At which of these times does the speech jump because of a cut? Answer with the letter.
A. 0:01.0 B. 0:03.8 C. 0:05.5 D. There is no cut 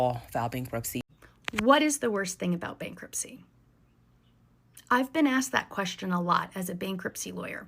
A